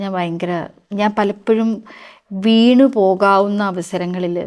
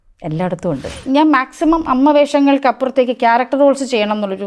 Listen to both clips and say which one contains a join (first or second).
second